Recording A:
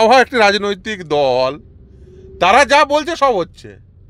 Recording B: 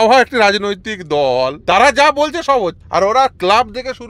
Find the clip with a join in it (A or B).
B